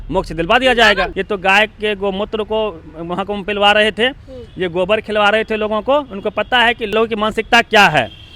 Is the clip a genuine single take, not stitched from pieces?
no; 2 cuts; at 1.2 s, 6.9 s

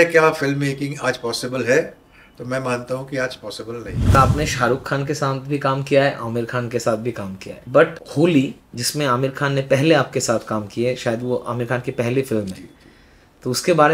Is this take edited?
yes; 2 cuts; at 4.1 s, 8.0 s

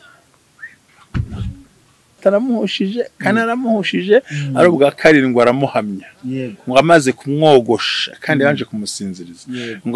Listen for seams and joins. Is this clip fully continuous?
no; 1 cut; at 2.2 s

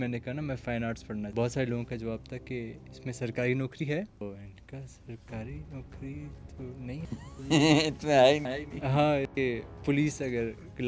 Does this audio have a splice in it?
yes; 3 cuts; at 1.3 s, 4.2 s, 9.2 s

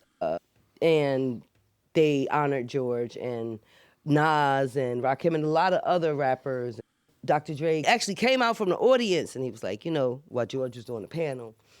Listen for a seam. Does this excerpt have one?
yes; 2 cuts; at 6.8 s, 7.8 s

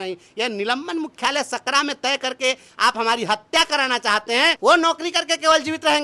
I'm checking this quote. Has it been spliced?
yes; 1 cut; at 4.6 s

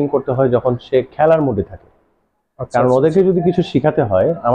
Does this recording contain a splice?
no; 0 cuts

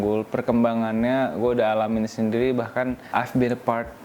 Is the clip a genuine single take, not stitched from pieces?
no; 1 cut; at 3.0 s

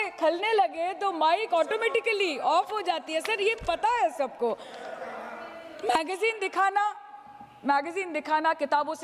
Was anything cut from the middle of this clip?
no; 0 cuts

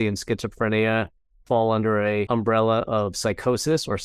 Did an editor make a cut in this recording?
yes; 1 cut; at 2.3 s

